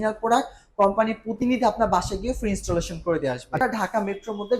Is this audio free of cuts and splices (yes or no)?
no